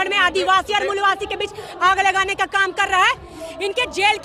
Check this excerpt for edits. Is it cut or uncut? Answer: uncut